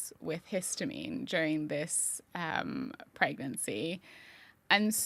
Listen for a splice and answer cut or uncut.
uncut